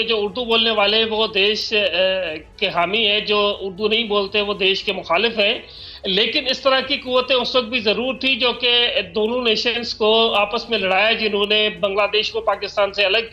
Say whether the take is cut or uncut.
uncut